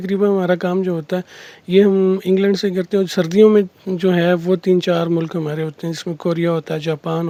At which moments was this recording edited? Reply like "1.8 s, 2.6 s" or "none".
none